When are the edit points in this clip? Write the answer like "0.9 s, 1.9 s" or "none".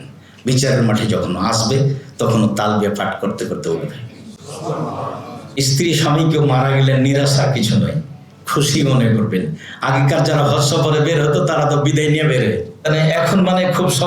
5.6 s, 12.7 s

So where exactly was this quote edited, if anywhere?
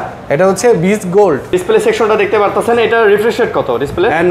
1.5 s

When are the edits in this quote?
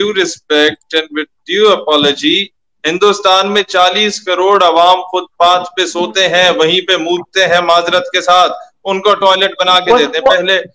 none

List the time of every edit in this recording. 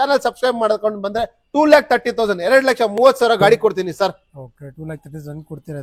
none

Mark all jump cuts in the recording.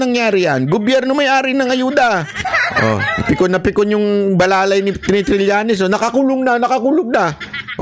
2.5 s

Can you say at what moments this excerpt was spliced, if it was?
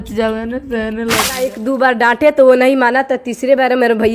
1.5 s

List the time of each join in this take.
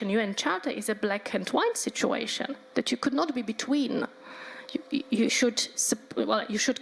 none

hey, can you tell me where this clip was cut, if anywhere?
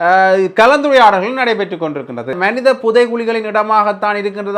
2.4 s

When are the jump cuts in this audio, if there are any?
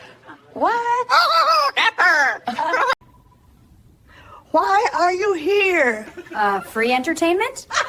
none

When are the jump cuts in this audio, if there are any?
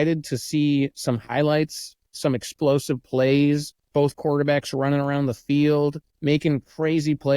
3.8 s, 6.1 s

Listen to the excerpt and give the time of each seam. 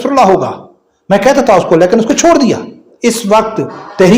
2.9 s

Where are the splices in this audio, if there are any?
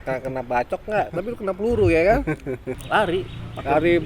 2.8 s

